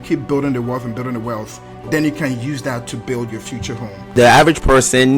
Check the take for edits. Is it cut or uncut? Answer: cut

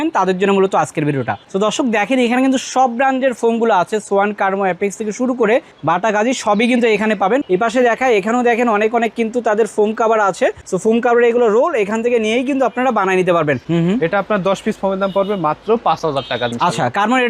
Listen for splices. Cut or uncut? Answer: cut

